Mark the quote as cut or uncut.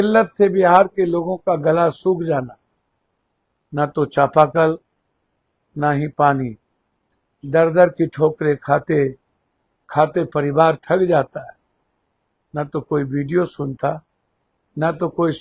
uncut